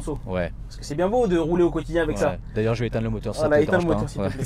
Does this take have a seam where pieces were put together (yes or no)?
no